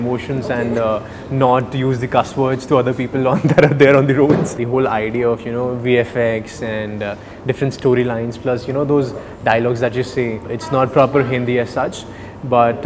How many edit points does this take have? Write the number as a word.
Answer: two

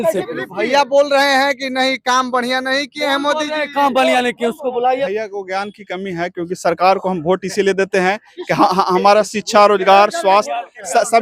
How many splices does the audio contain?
one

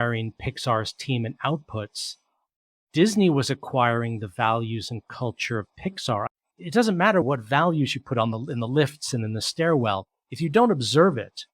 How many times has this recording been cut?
two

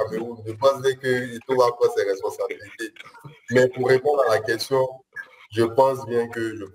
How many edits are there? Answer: zero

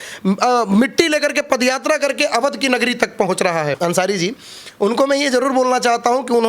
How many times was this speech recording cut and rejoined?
one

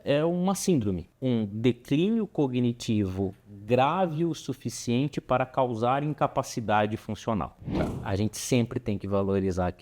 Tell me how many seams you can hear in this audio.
two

